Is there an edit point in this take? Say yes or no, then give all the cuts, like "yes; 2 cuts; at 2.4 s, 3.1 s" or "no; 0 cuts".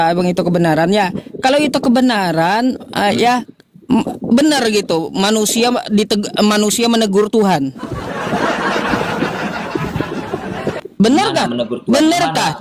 no; 0 cuts